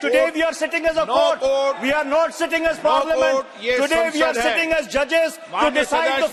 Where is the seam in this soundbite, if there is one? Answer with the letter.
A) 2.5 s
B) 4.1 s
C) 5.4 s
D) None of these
D